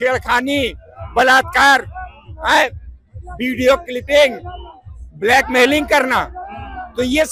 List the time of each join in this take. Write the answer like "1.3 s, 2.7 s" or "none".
none